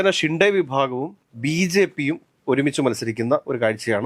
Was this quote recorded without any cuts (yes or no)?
yes